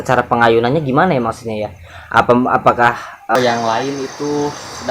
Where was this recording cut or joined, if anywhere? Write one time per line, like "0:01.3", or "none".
0:03.3